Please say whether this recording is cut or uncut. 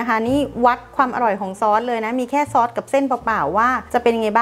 uncut